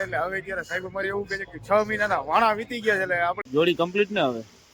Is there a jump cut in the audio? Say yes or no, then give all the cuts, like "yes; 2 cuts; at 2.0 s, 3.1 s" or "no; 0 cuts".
yes; 1 cut; at 3.4 s